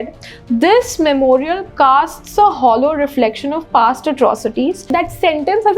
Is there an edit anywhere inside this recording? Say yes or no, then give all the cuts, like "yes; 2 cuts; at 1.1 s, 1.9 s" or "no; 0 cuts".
yes; 1 cut; at 4.9 s